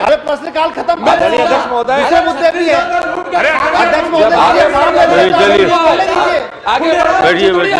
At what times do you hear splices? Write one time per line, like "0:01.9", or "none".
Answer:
none